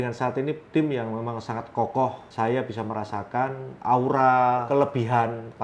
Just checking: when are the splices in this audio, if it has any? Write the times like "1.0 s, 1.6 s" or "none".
2.2 s, 4.7 s